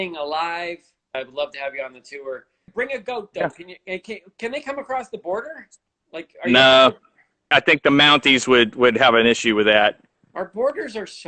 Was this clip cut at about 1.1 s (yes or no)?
yes